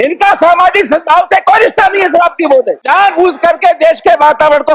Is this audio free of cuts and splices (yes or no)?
no